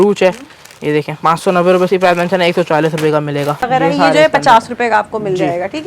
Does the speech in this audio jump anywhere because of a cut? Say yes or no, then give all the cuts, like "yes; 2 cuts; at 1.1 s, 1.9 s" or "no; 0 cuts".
yes; 1 cut; at 3.6 s